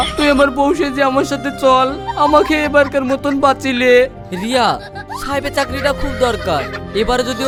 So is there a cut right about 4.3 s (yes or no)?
no